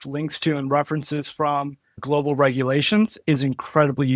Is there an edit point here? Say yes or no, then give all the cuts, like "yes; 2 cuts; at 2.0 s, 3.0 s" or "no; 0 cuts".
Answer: no; 0 cuts